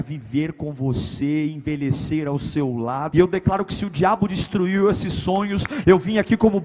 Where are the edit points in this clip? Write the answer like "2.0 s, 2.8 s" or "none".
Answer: 3.1 s